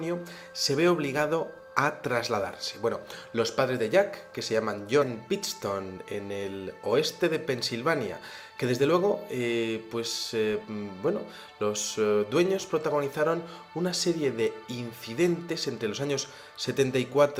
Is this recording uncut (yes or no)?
yes